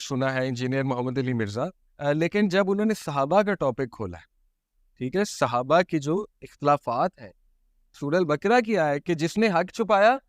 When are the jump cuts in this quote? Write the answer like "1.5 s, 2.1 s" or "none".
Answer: 1.9 s, 7.9 s